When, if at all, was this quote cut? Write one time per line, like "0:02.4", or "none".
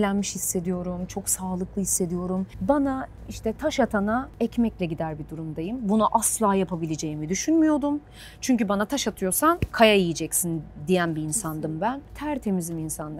0:02.5
0:12.1